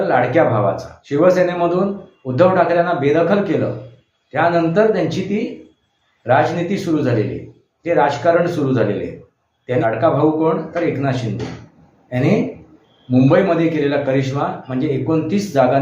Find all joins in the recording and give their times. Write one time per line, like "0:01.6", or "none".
0:00.9
0:09.8